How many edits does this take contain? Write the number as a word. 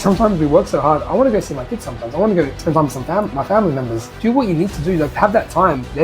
two